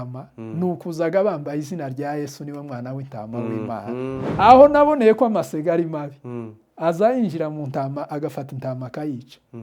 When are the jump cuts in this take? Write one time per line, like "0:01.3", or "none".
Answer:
0:04.3